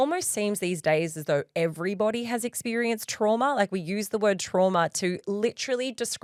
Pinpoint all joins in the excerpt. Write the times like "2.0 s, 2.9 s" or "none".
none